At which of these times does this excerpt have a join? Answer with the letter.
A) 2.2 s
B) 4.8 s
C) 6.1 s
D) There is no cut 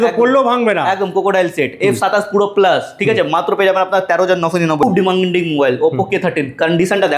B